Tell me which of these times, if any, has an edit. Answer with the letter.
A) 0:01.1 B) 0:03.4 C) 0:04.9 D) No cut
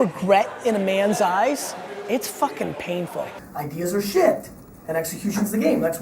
B